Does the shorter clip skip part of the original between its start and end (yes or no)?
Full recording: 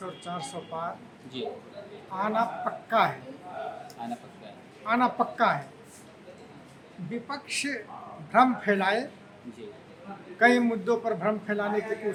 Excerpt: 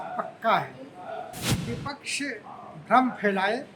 yes